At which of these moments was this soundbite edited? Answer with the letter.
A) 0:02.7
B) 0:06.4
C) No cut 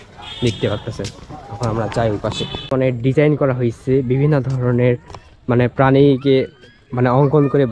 A